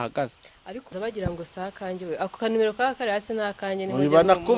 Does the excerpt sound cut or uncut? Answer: cut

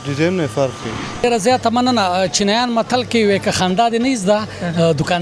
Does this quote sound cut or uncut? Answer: cut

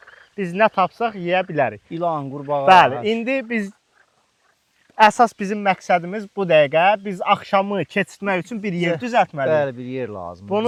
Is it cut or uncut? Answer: uncut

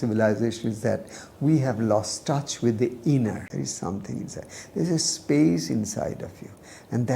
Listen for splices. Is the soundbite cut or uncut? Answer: cut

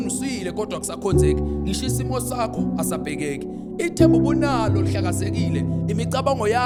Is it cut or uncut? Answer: uncut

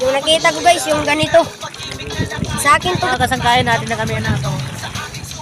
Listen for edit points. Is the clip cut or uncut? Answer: cut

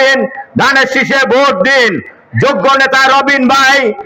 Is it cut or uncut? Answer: uncut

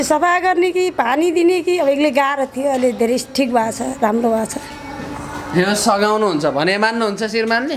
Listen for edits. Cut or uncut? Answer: uncut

